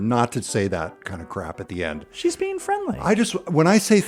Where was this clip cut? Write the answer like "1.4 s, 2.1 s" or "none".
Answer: none